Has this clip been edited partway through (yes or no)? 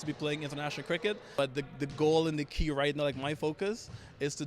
yes